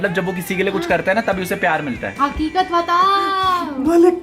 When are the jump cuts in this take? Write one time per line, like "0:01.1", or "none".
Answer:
0:02.1